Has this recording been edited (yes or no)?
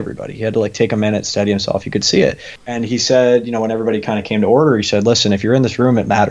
yes